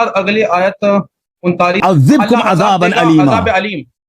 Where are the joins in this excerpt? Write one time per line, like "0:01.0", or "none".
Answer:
0:01.8